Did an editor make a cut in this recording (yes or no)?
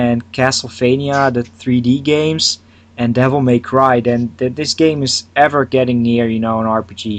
yes